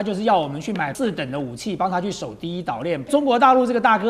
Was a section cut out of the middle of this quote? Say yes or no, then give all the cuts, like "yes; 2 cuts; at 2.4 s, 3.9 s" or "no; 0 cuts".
yes; 2 cuts; at 0.9 s, 3.1 s